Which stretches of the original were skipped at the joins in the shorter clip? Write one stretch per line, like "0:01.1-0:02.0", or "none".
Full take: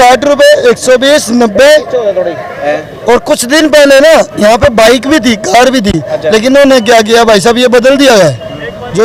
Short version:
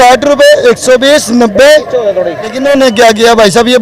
0:02.6-0:06.4